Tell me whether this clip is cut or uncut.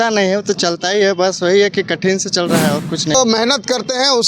cut